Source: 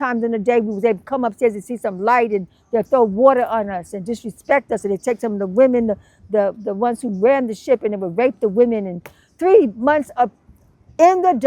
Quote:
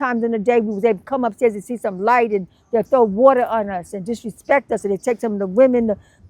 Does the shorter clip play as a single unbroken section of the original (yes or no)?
yes